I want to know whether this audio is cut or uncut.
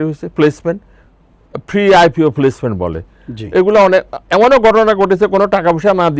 uncut